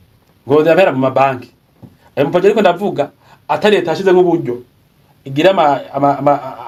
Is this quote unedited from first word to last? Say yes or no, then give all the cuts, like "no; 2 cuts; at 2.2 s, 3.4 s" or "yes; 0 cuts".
yes; 0 cuts